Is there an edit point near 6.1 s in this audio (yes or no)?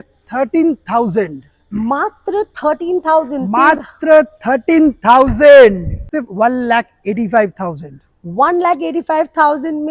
yes